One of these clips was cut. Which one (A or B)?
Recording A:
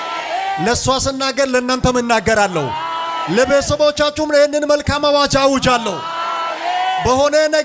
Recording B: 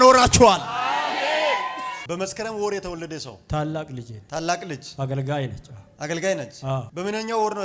B